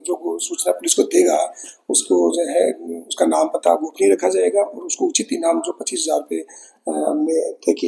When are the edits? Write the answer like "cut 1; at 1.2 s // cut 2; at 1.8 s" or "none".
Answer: none

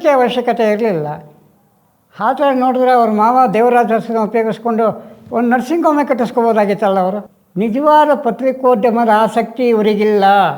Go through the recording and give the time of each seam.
cut 1; at 7.3 s

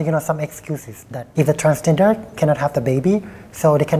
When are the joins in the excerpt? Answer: cut 1; at 1.2 s

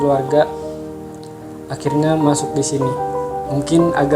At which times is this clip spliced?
cut 1; at 3.0 s

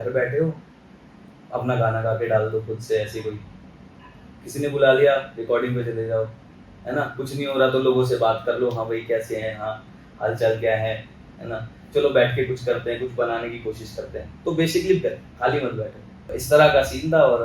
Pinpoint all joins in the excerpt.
cut 1; at 16.4 s

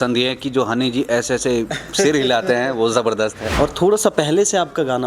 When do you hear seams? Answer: cut 1; at 3.4 s

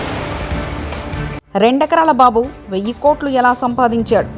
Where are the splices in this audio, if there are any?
cut 1; at 1.4 s

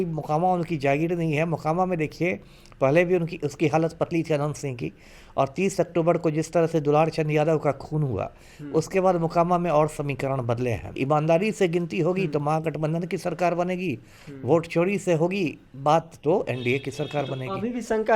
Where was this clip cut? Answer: cut 1; at 10.9 s

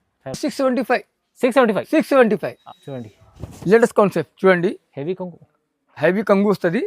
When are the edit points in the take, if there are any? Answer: cut 1; at 2.6 s

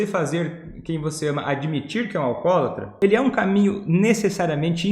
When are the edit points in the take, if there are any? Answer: cut 1; at 2.9 s

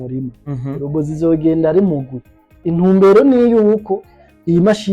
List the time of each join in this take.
cut 1; at 2.6 s

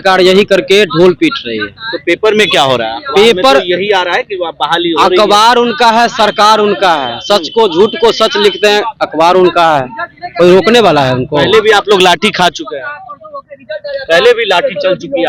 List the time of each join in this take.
none

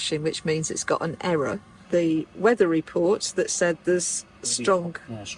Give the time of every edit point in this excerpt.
cut 1; at 1.7 s

